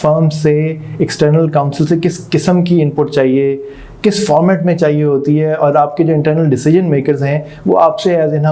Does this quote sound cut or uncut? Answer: uncut